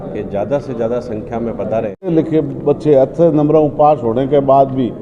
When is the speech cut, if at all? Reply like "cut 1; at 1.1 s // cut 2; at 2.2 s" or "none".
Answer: cut 1; at 2.1 s